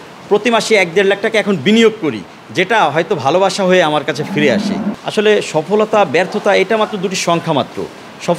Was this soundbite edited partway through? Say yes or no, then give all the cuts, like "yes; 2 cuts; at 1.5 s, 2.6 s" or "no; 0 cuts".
no; 0 cuts